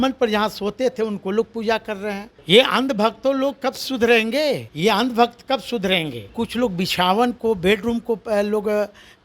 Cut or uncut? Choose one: cut